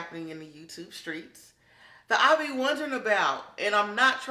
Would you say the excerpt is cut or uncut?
uncut